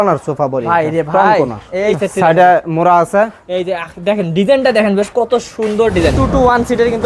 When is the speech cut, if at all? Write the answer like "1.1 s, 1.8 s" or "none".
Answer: 1.9 s, 6.2 s